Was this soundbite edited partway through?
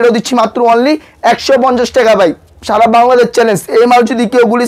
no; 0 cuts

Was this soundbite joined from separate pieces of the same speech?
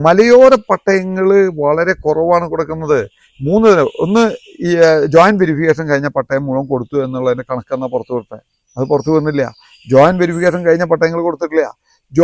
no; 0 cuts

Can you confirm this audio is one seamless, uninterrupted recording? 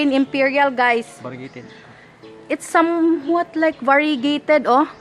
yes; 0 cuts

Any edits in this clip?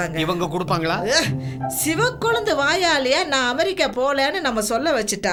no; 0 cuts

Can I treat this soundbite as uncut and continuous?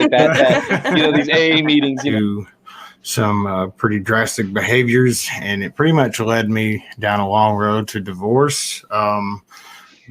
no; 1 cut; at 2.1 s

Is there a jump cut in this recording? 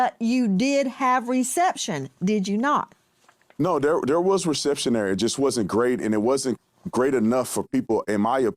no; 0 cuts

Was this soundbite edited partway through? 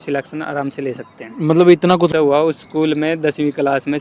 yes; 1 cut; at 2.1 s

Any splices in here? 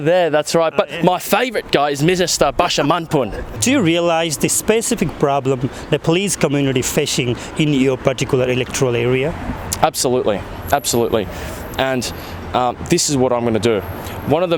no; 0 cuts

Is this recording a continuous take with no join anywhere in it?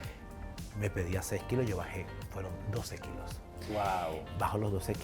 yes; 0 cuts

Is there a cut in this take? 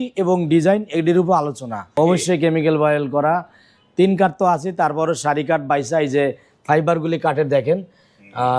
yes; 1 cut; at 1.9 s

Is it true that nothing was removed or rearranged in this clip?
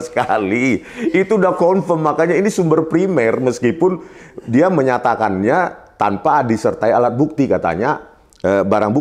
yes; 0 cuts

